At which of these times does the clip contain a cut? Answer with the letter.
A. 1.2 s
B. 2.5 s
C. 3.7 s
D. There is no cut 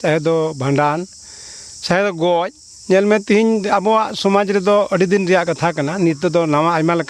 D